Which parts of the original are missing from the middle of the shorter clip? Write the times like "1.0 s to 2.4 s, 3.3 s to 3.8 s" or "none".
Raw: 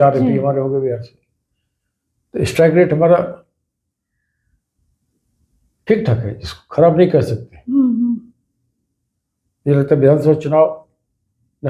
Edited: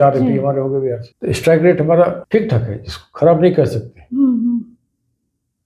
1.1 s to 2.2 s, 3.3 s to 5.8 s